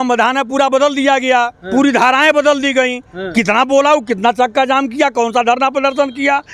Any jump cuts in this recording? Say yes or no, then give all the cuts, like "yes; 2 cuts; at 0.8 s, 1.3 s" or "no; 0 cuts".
no; 0 cuts